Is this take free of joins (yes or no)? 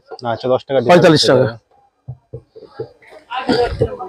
yes